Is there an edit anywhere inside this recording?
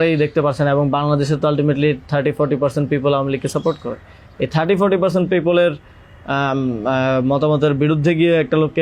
no; 0 cuts

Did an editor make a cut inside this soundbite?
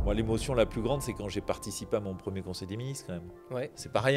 no; 0 cuts

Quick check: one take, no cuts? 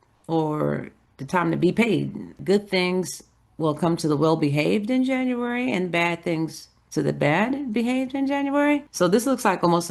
no; 2 cuts; at 2.4 s, 8.9 s

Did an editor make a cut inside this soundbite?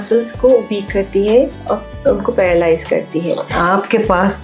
yes; 1 cut; at 3.5 s

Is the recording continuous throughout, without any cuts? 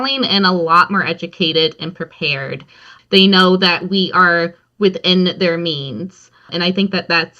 no; 2 cuts; at 2.8 s, 6.5 s

